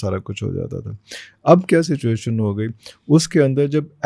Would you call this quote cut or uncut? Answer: uncut